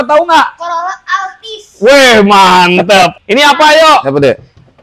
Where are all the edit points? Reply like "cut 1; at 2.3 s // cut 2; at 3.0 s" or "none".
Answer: cut 1; at 3.1 s